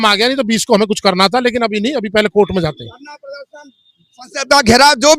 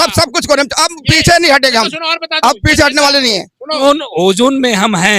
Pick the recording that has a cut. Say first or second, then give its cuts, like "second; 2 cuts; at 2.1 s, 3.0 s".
second; 1 cut; at 3.8 s